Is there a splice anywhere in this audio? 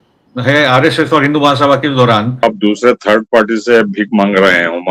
yes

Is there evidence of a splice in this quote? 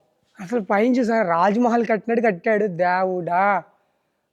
no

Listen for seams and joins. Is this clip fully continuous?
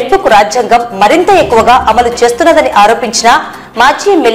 yes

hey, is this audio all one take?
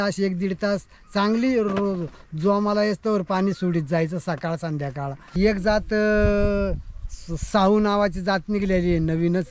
no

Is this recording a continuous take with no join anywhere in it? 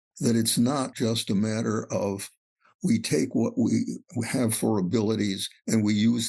no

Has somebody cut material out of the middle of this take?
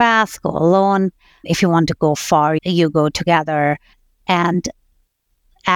yes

